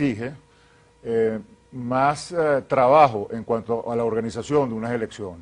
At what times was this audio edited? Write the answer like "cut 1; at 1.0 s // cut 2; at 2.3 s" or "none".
cut 1; at 4.0 s